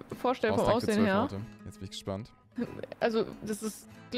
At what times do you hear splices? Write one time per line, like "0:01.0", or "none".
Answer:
none